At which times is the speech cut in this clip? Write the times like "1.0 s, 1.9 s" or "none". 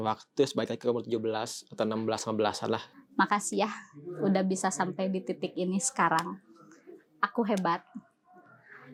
none